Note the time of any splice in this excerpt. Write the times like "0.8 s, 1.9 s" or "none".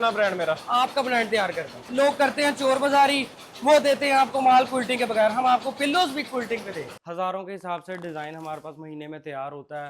1.9 s, 6.9 s